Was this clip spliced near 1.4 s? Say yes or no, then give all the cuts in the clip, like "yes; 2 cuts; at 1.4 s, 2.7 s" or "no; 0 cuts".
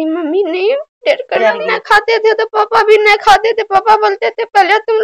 yes; 1 cut; at 1.4 s